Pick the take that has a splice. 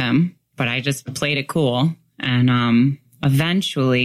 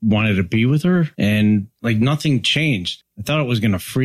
second; 3 cuts; at 1.1 s, 1.7 s, 2.9 s

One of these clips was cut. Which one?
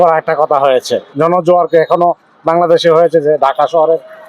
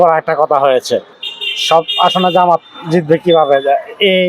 first; 1 cut; at 1.0 s

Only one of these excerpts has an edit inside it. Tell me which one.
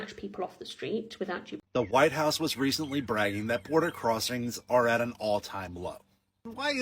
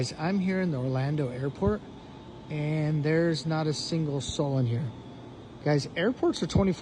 first; 1 cut; at 1.5 s

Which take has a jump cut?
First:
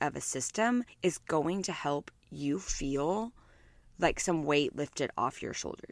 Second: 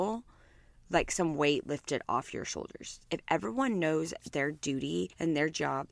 first; 1 cut; at 0.9 s

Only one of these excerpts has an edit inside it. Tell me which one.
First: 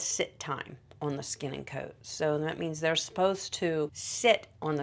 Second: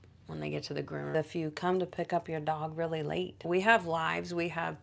second; 2 cuts; at 1.1 s, 3.4 s

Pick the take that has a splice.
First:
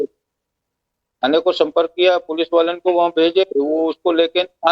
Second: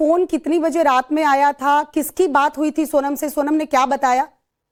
first; 1 cut; at 3.1 s

